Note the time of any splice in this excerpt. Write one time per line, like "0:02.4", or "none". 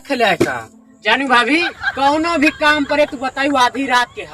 0:01.8

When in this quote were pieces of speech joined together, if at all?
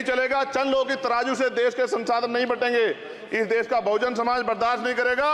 none

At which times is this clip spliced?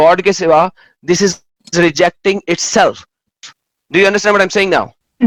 none

